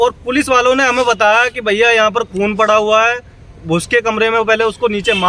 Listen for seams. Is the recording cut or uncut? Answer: uncut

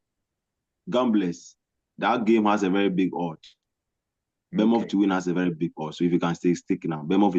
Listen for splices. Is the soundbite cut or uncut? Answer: uncut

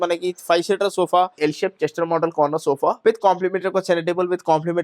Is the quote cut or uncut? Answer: cut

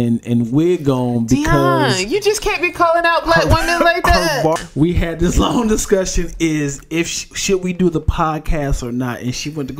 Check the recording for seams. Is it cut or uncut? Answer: cut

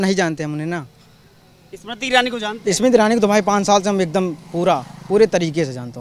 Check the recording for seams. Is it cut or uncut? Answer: uncut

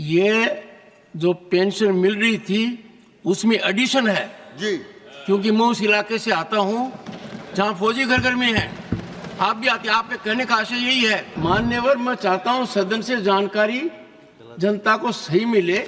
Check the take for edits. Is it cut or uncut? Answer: cut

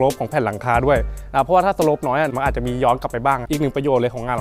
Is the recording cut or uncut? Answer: cut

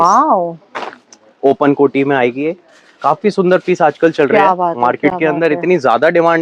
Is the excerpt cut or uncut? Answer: uncut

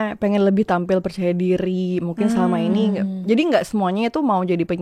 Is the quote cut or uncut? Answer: uncut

